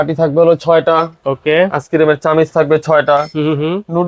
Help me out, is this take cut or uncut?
uncut